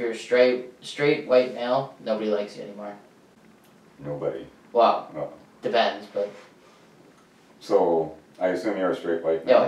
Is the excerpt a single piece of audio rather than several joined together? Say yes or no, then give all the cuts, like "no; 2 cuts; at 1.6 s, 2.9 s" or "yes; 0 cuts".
yes; 0 cuts